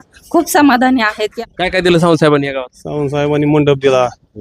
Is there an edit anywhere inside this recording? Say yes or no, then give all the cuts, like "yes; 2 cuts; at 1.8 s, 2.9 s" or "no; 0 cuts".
yes; 1 cut; at 1.3 s